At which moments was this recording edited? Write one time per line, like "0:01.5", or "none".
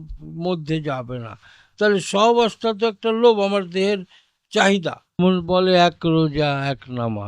0:05.2